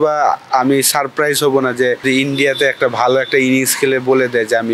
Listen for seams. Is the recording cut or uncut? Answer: cut